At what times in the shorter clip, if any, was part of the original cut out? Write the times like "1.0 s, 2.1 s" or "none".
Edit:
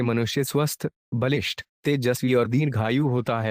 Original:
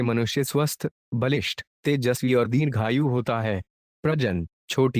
none